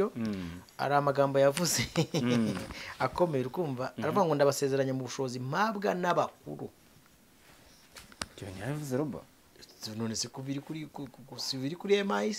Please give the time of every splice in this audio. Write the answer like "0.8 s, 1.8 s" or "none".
none

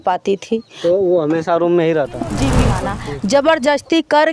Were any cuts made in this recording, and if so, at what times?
2.7 s

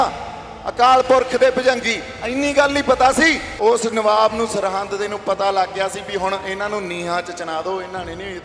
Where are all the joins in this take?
3.5 s

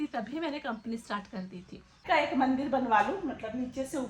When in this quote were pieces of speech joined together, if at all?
2.0 s

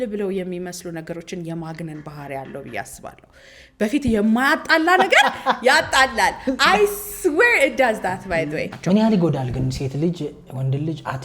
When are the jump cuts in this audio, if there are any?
8.7 s

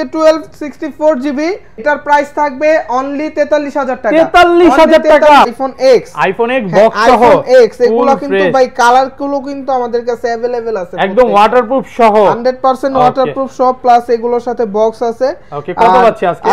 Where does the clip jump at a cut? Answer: 1.8 s, 5.5 s

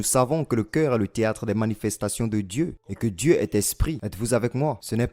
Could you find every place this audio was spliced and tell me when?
2.8 s, 4.0 s

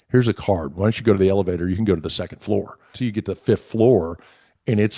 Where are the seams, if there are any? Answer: 3.0 s

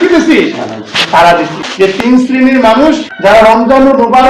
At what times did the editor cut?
2.0 s, 3.1 s

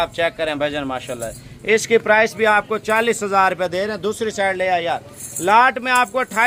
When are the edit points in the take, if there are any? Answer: none

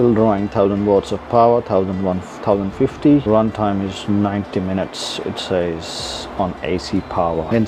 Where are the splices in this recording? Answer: none

